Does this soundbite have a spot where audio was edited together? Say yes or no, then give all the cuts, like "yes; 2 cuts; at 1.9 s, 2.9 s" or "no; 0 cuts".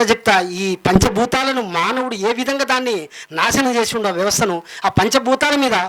no; 0 cuts